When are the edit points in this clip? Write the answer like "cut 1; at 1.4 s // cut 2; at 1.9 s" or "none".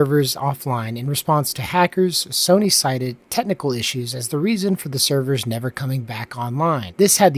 none

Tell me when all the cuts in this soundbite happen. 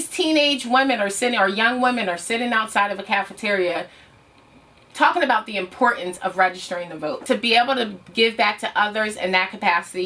cut 1; at 7.2 s

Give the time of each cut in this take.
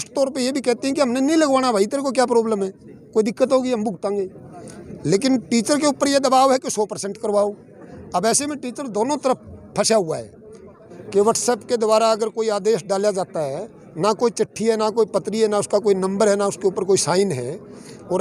cut 1; at 10.9 s

